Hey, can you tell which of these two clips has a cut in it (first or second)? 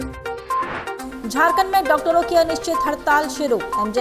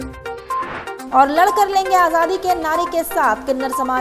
first